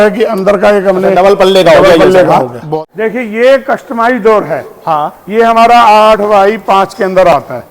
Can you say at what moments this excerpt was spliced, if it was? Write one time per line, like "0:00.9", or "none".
0:02.8